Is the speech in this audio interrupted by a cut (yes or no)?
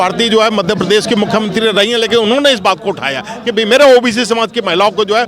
no